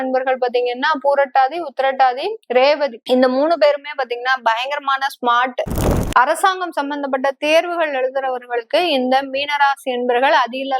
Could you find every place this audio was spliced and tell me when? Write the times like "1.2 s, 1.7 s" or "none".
2.3 s, 3.0 s, 5.9 s